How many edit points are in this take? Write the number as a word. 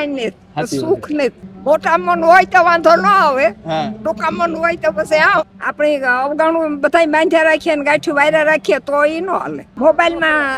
three